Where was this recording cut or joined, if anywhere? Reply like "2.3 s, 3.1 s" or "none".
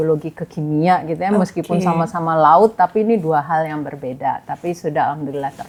none